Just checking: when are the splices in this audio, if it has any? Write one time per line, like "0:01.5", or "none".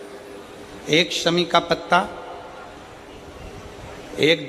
none